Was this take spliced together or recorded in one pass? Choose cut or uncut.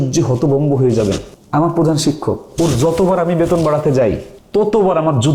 cut